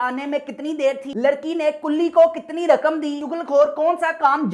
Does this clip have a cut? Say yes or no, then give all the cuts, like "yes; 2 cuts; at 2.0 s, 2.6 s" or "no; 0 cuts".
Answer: yes; 2 cuts; at 1.1 s, 3.3 s